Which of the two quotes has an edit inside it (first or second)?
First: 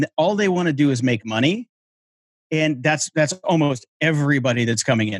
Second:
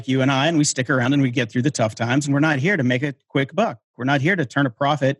second